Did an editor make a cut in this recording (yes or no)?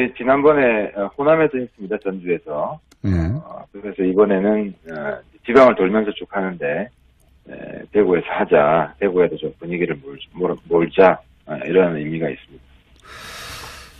no